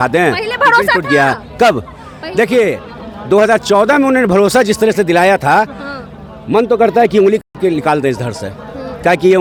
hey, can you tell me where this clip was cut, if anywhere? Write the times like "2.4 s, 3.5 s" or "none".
none